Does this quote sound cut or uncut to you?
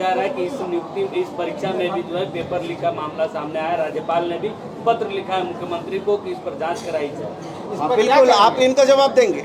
uncut